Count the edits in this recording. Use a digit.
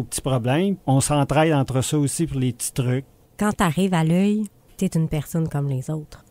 2